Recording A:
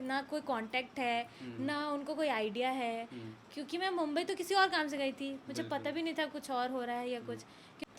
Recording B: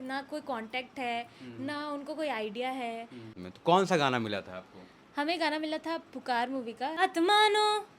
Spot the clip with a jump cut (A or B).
B